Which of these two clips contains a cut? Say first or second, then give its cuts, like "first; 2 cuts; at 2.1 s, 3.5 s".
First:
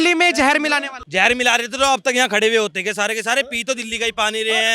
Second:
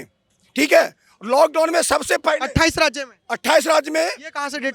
first; 1 cut; at 1.0 s